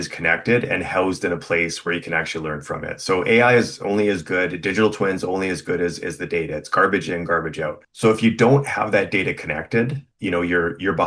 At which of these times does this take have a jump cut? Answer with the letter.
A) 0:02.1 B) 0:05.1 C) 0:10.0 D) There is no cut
C